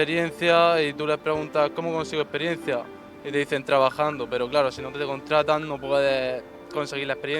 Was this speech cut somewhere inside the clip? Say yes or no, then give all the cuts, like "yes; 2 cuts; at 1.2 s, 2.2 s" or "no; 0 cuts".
no; 0 cuts